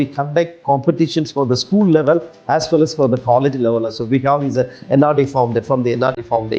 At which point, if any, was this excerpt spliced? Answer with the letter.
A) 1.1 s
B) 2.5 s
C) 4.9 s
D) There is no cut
D